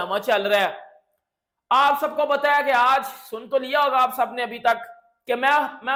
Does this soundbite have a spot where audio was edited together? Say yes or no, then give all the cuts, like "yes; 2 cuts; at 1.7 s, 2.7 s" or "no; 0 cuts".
no; 0 cuts